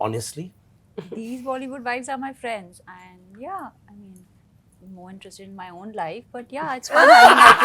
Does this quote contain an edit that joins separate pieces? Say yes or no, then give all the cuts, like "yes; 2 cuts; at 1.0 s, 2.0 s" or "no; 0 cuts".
no; 0 cuts